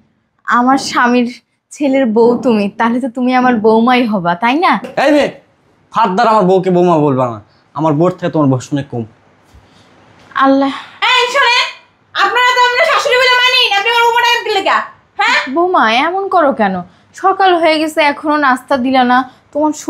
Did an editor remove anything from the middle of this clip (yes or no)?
no